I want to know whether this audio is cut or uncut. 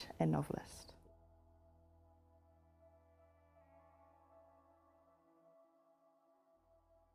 uncut